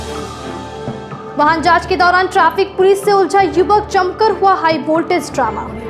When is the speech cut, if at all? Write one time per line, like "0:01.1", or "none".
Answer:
none